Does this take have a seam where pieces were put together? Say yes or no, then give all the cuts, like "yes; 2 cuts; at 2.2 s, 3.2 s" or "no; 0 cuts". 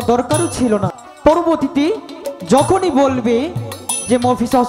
yes; 1 cut; at 1.0 s